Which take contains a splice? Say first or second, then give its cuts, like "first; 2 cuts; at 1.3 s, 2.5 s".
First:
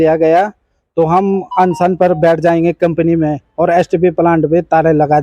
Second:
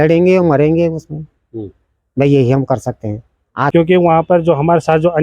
second; 1 cut; at 3.7 s